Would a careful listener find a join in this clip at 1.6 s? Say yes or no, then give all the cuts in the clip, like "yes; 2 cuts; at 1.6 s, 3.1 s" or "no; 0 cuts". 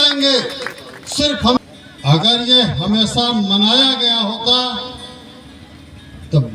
yes; 1 cut; at 1.6 s